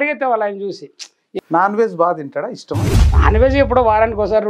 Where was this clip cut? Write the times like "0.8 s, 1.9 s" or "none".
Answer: 1.3 s